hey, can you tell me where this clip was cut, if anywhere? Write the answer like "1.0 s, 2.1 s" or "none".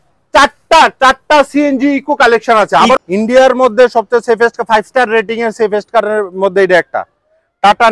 3.0 s